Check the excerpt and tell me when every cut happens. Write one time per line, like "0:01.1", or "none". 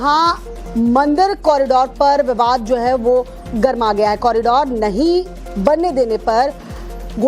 0:05.4